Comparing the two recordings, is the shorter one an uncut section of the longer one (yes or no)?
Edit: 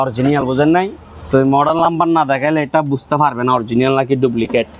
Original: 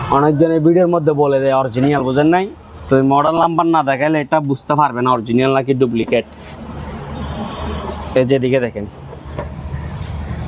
yes